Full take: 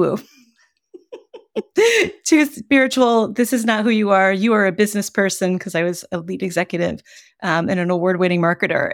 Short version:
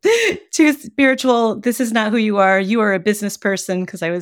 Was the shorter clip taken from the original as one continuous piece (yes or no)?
yes